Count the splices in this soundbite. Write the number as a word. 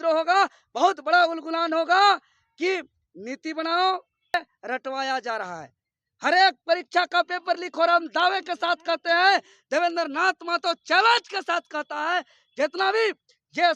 one